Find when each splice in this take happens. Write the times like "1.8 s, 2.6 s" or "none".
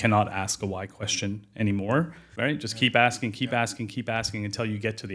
2.2 s

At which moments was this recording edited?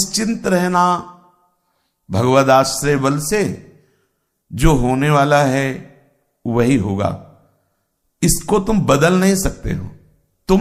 none

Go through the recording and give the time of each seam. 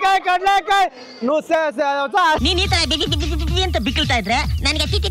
none

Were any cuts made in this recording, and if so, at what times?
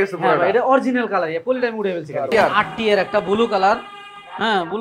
2.3 s

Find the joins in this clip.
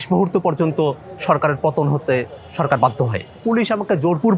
3.4 s

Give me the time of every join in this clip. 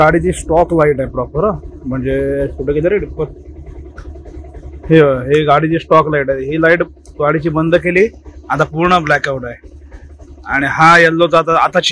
none

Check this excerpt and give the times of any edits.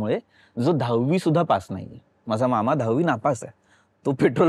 none

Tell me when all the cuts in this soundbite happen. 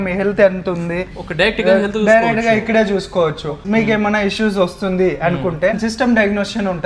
3.6 s, 5.8 s

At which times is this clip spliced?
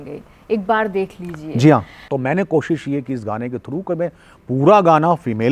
2.0 s

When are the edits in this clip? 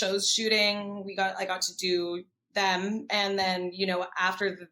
none

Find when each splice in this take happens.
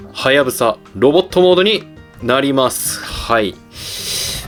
none

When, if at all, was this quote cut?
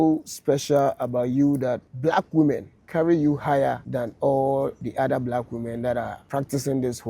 1.9 s, 2.8 s, 3.9 s, 4.8 s, 6.2 s

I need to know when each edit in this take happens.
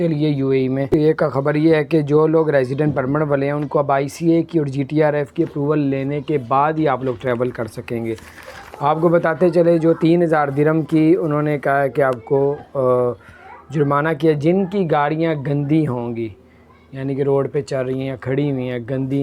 0.9 s

